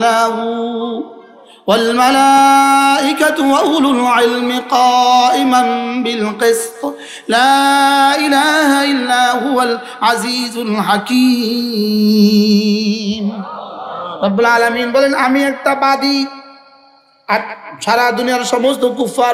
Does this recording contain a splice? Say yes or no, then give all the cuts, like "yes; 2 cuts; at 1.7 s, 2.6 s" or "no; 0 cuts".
no; 0 cuts